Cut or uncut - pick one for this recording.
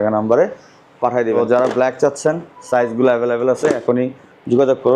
cut